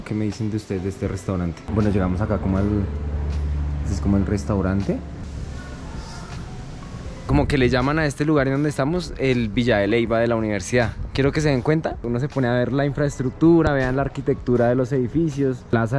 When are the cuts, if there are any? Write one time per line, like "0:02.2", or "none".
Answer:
0:01.6
0:07.2

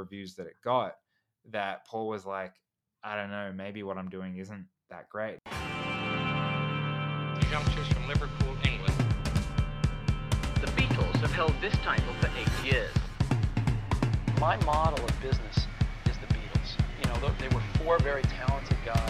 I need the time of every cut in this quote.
0:05.6

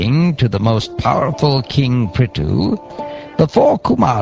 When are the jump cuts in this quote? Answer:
0:01.8

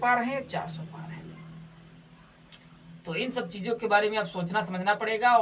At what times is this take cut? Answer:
none

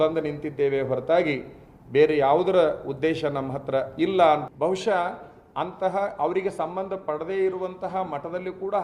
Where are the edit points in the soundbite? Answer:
0:04.5

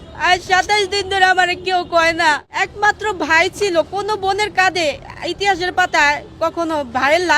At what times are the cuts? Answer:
0:02.5

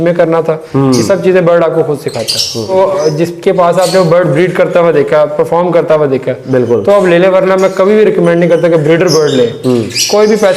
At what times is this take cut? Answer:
0:02.7

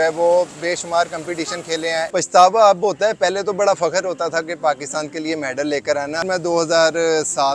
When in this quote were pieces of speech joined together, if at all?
0:02.1
0:06.2

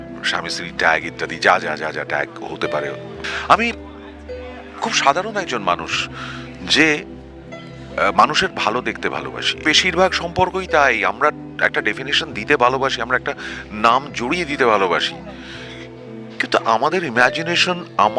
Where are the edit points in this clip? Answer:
0:03.1
0:09.5

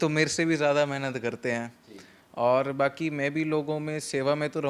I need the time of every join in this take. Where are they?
none

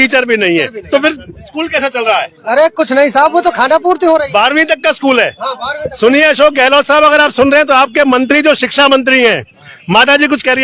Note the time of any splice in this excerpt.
none

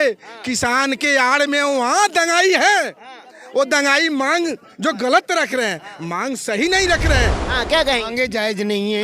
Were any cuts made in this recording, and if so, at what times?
0:07.4

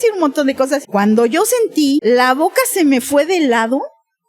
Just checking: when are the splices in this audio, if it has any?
0:00.8
0:02.0

